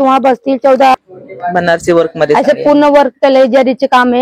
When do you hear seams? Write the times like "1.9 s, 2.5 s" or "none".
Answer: 1.0 s

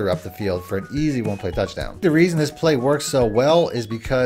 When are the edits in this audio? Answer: 2.0 s

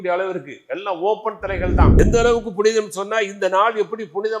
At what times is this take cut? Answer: 2.0 s

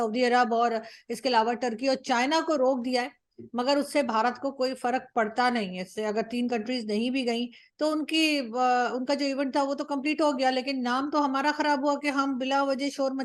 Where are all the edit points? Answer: none

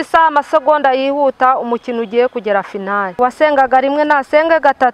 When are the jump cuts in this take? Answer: 3.1 s

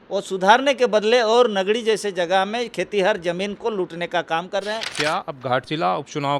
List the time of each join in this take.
4.9 s

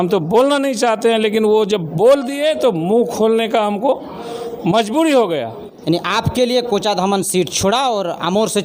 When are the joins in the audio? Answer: 5.7 s

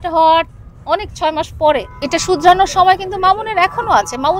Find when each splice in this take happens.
1.9 s

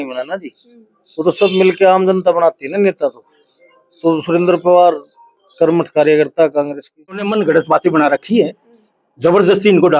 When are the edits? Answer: 7.3 s

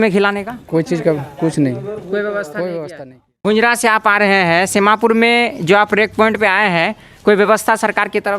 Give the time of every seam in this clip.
3.3 s

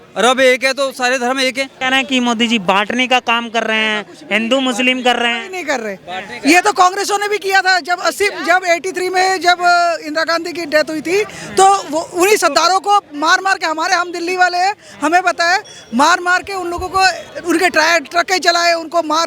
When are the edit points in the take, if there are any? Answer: 1.7 s

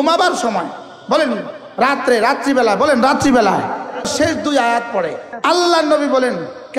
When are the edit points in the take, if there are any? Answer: 4.1 s, 5.3 s

